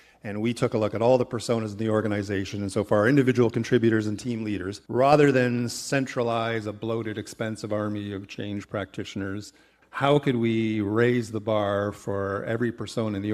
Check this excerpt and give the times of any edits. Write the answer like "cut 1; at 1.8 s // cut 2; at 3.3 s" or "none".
cut 1; at 4.8 s